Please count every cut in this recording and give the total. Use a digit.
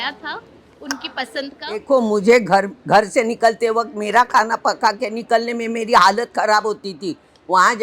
1